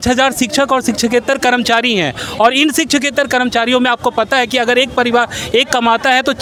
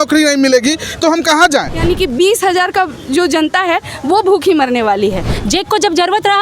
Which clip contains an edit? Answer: second; 2 cuts; at 1.8 s, 5.3 s

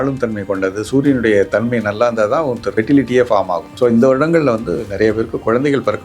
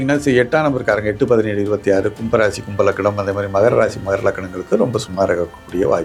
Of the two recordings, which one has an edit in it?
first; 2 cuts; at 2.6 s, 3.6 s

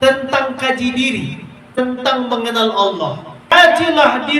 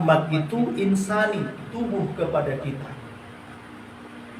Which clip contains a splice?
first; 2 cuts; at 1.8 s, 3.5 s

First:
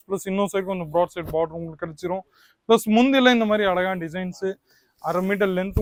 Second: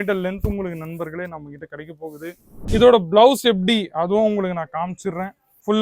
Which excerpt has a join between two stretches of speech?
second; 1 cut; at 2.5 s

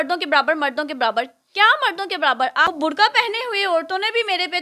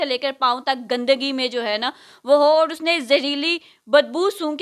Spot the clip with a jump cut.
first; 1 cut; at 2.7 s

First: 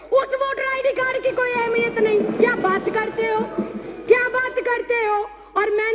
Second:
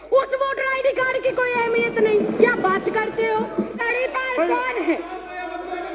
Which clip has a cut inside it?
second; 1 cut; at 3.8 s

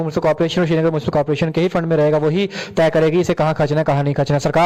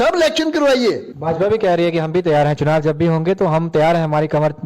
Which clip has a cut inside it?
second; 1 cut; at 1.1 s

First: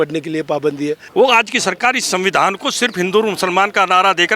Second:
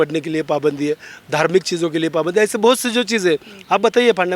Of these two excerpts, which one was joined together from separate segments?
first; 1 cut; at 1.0 s

